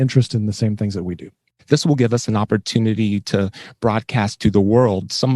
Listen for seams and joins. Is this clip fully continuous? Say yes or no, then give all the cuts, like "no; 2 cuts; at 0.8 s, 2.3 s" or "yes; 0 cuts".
no; 1 cut; at 1.3 s